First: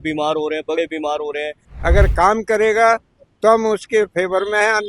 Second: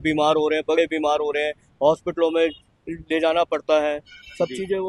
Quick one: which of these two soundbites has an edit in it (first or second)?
first